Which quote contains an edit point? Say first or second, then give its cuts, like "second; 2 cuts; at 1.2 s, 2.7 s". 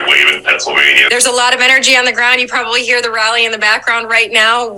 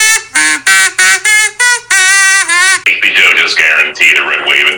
second; 1 cut; at 2.8 s